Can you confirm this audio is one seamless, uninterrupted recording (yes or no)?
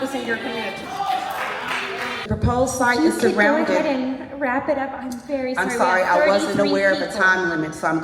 no